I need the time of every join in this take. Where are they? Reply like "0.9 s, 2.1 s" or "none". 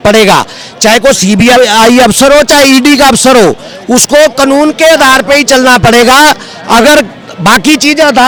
none